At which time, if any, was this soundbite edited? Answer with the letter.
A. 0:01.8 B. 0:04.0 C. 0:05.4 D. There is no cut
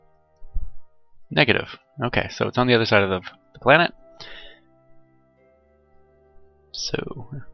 A